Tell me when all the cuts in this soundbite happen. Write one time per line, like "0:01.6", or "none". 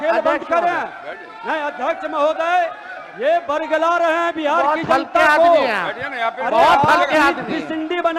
none